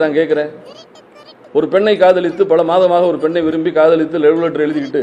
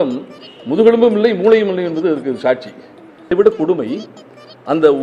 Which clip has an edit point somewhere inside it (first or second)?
second